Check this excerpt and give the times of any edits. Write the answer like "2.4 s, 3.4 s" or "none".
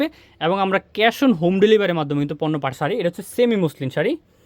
2.7 s